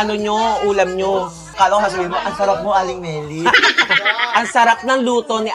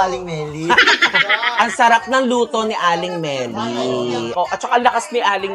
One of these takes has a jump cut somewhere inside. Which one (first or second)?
second